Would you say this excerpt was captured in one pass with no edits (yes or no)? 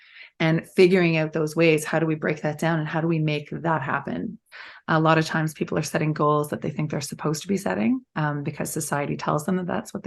no